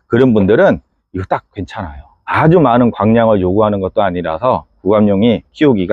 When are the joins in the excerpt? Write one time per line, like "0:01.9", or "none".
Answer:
none